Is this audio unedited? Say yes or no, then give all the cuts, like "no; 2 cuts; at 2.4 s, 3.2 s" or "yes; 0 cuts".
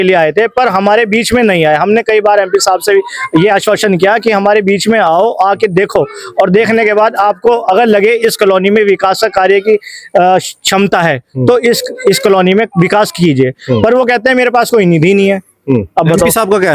yes; 0 cuts